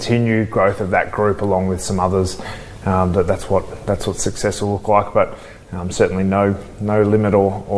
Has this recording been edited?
no; 0 cuts

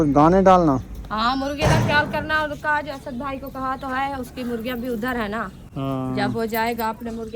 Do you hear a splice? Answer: no; 0 cuts

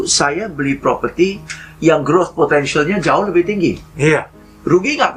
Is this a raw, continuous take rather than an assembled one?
yes; 0 cuts

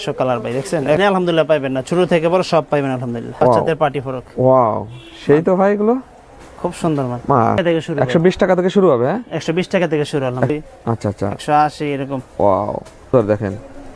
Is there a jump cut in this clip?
yes; 5 cuts; at 1.0 s, 3.3 s, 7.6 s, 10.5 s, 13.1 s

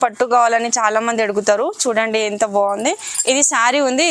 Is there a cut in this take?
no; 0 cuts

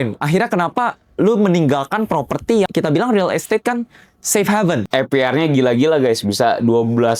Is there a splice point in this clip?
yes; 2 cuts; at 2.7 s, 4.9 s

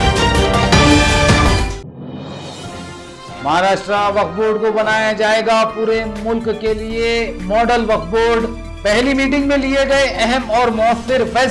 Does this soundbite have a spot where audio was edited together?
yes; 1 cut; at 2.7 s

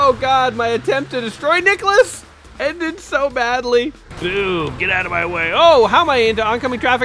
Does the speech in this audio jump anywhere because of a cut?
yes; 1 cut; at 4.1 s

